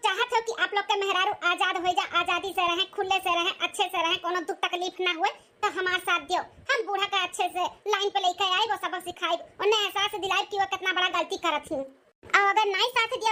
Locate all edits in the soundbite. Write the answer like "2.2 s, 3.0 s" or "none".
none